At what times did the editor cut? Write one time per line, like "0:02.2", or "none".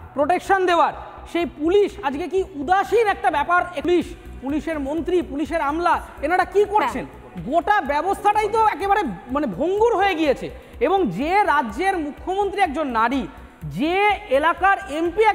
0:03.8